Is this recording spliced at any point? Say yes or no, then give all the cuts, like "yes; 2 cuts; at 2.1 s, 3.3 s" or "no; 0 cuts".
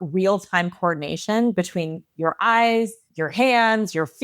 yes; 1 cut; at 3.0 s